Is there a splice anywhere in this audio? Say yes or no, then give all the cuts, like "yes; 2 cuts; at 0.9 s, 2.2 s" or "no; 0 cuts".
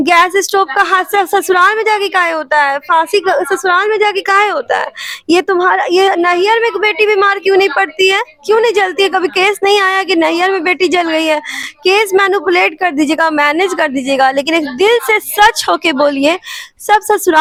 no; 0 cuts